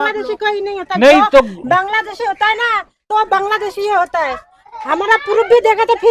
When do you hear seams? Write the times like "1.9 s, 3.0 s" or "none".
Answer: none